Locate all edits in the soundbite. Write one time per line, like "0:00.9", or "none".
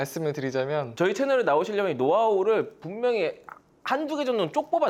none